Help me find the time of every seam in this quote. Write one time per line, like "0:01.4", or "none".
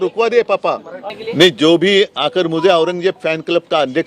0:01.1